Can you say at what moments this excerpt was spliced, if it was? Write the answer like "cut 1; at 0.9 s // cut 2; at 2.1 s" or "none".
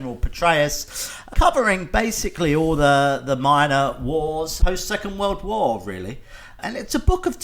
cut 1; at 1.3 s // cut 2; at 4.5 s // cut 3; at 6.6 s